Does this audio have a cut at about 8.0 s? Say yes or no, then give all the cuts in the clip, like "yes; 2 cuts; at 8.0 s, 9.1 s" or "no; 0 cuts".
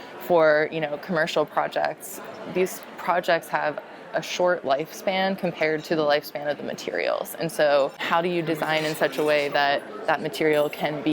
yes; 1 cut; at 8.0 s